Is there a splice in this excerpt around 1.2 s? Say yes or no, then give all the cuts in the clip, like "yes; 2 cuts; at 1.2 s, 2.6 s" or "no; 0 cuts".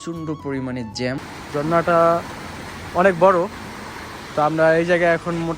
yes; 1 cut; at 1.2 s